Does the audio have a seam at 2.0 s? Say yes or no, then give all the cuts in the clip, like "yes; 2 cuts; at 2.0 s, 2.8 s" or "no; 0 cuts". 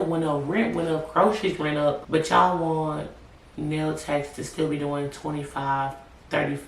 yes; 1 cut; at 2.0 s